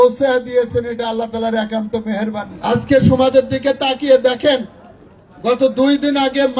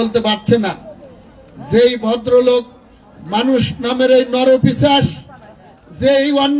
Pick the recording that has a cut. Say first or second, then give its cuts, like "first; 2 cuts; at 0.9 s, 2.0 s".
first; 1 cut; at 2.5 s